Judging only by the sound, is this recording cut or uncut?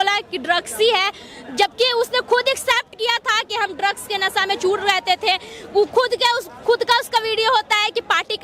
uncut